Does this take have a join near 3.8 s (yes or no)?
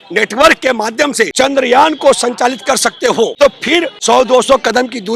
yes